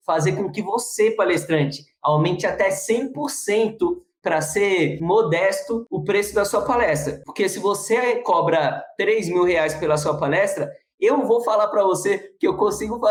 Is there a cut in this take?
no; 0 cuts

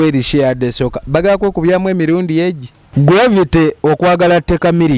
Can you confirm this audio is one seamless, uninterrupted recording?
no; 1 cut; at 2.8 s

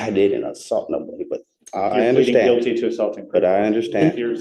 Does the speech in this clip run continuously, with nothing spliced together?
yes; 0 cuts

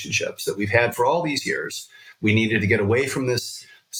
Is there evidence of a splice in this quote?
no; 0 cuts

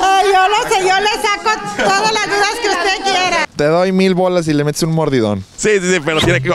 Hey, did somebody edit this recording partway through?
yes; 2 cuts; at 3.5 s, 5.5 s

